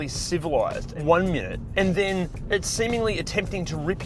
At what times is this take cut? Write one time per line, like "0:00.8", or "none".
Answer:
0:00.9
0:01.6
0:02.4

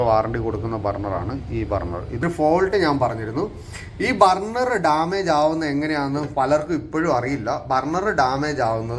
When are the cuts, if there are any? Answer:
0:02.2

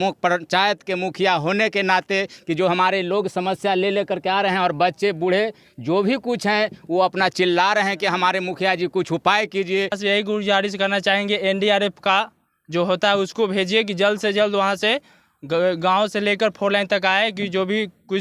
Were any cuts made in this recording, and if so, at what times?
0:10.0

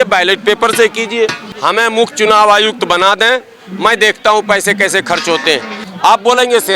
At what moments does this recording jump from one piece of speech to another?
0:01.5
0:05.8

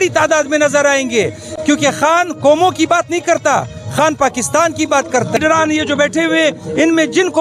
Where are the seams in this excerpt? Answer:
0:05.4

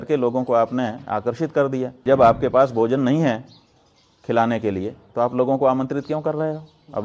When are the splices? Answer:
0:01.9

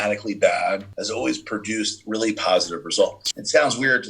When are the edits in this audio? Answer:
0:00.9
0:03.2

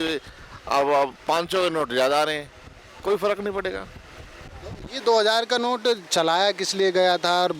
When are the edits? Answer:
none

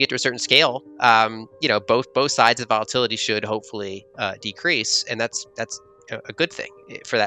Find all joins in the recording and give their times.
none

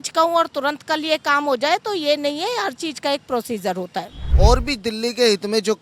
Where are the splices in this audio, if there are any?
0:04.3

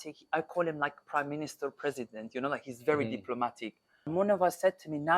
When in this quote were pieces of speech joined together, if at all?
0:04.1

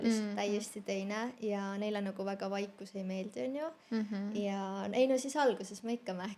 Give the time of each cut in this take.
none

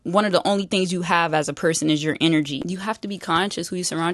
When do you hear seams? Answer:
0:02.6

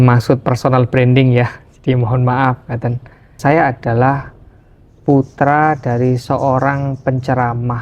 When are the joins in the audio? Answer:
0:03.3

